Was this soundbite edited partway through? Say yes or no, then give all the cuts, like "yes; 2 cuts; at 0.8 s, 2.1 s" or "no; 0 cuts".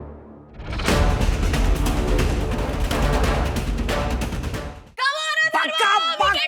yes; 2 cuts; at 2.7 s, 4.5 s